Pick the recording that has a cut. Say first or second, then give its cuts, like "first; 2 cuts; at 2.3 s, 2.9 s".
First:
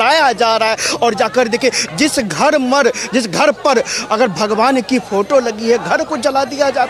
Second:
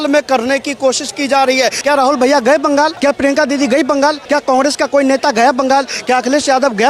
second; 3 cuts; at 1.8 s, 3.0 s, 4.2 s